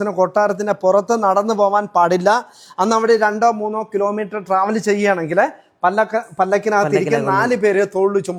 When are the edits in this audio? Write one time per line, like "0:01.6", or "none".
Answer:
none